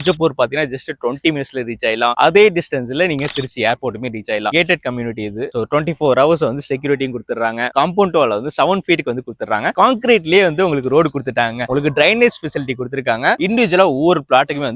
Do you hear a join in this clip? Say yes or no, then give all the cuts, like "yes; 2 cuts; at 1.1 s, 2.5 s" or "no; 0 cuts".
yes; 4 cuts; at 4.5 s, 9.7 s, 11.7 s, 13.4 s